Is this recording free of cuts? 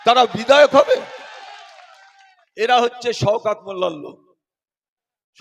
yes; 0 cuts

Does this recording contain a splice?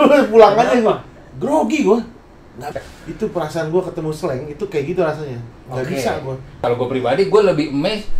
yes; 2 cuts; at 2.6 s, 6.6 s

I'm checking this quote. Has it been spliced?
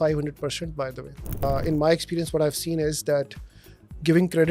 yes; 1 cut; at 1.4 s

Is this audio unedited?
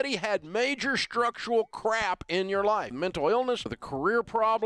no; 2 cuts; at 2.9 s, 3.8 s

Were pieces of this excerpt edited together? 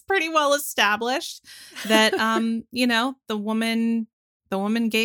no; 0 cuts

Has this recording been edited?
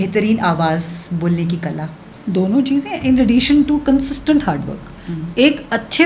no; 0 cuts

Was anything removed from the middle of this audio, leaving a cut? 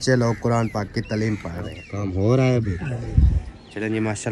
yes; 1 cut; at 1.8 s

